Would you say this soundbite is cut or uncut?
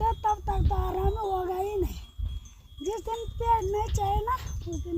uncut